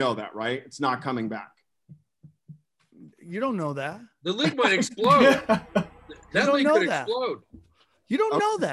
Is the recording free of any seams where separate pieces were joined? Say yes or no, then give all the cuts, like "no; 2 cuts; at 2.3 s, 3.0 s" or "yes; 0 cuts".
yes; 0 cuts